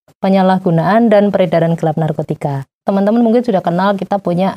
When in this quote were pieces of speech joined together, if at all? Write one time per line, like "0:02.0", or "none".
0:02.7